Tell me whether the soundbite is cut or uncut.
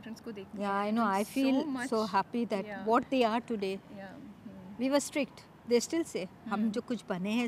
uncut